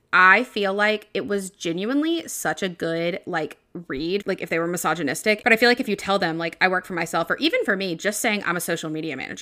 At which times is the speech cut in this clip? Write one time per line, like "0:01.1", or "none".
0:04.2
0:05.4